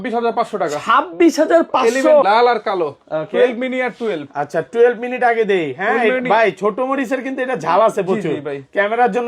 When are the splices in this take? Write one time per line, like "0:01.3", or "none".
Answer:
0:02.2